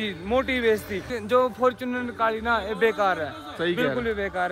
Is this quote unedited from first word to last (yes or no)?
no